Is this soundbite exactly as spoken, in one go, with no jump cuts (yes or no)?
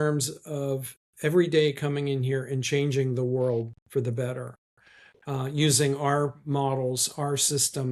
yes